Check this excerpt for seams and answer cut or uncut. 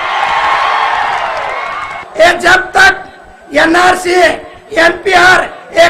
cut